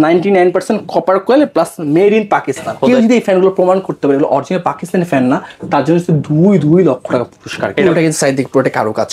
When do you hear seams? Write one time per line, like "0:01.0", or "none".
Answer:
0:02.8
0:07.8